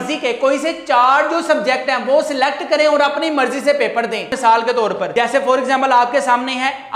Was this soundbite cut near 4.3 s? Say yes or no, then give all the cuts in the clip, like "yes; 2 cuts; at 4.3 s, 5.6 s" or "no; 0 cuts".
yes; 2 cuts; at 4.3 s, 5.0 s